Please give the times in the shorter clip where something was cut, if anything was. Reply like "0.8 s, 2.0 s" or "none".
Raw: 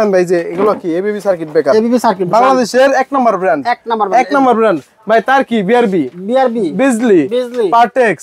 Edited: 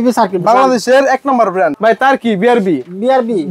1.7 s